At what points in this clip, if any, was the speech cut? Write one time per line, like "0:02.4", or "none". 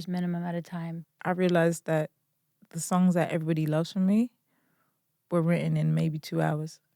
0:01.0